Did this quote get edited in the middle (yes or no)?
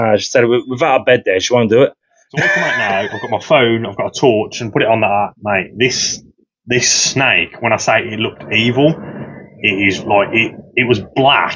yes